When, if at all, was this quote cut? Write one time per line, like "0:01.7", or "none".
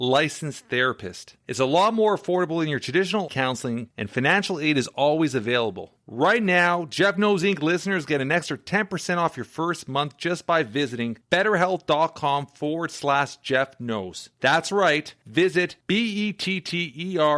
none